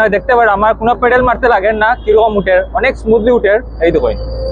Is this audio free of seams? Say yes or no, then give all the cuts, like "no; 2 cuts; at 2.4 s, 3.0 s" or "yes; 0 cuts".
yes; 0 cuts